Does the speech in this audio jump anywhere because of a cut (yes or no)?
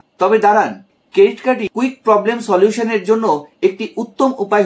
yes